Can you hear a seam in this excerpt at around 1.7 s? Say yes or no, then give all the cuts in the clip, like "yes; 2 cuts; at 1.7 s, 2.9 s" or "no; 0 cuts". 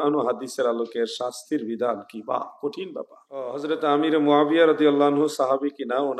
no; 1 cut; at 3.6 s